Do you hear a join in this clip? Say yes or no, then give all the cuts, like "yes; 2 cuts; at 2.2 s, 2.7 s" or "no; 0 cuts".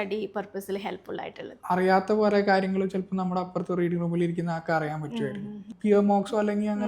yes; 2 cuts; at 1.5 s, 5.7 s